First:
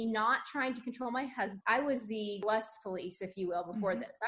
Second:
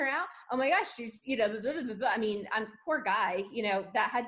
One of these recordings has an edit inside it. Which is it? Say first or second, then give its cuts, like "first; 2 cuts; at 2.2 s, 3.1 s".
first; 2 cuts; at 1.6 s, 2.4 s